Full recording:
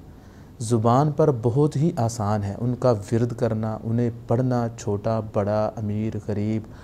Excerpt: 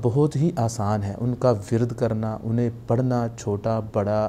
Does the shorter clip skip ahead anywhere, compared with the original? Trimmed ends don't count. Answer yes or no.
no